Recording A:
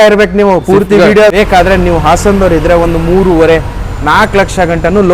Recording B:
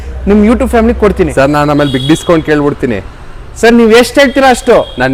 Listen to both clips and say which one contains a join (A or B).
A